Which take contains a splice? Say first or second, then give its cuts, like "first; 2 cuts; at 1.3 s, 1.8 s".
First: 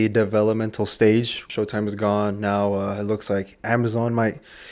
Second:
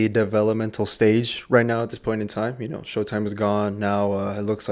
first; 1 cut; at 1.4 s